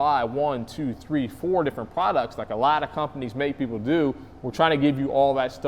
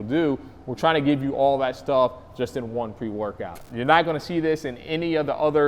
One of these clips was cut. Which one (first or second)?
second